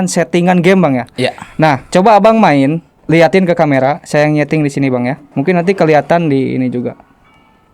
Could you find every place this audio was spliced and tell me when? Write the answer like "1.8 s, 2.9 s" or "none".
2.9 s, 5.2 s